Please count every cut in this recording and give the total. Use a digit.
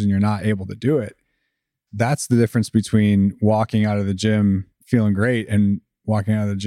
1